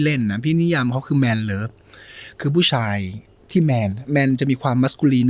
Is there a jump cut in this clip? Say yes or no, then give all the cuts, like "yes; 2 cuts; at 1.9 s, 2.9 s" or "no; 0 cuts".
no; 0 cuts